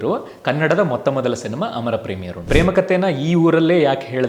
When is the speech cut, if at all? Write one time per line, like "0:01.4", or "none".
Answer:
0:02.4